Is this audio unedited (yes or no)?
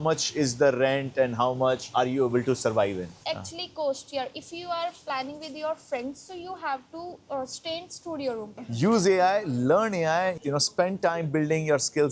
no